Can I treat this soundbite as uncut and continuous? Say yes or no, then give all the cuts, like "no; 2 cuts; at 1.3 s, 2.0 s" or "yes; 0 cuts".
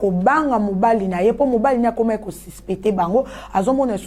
yes; 0 cuts